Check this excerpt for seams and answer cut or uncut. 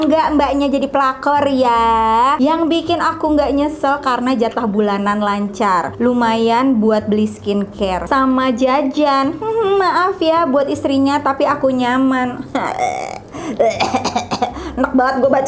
uncut